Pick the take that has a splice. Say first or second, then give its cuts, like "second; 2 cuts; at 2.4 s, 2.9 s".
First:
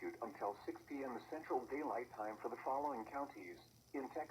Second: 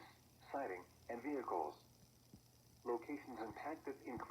second; 1 cut; at 0.9 s